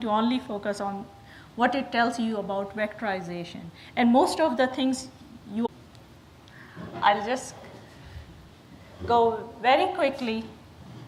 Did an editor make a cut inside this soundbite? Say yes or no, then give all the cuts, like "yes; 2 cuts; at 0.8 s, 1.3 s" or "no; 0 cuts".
no; 0 cuts